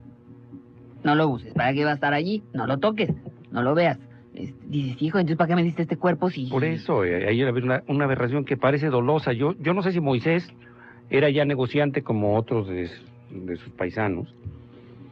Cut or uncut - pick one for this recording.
cut